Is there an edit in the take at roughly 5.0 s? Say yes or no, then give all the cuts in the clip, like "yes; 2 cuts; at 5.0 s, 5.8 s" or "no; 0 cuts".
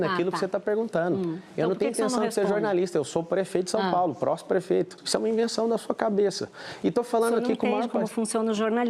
yes; 1 cut; at 5.0 s